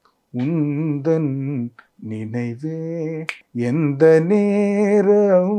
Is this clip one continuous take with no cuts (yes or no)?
no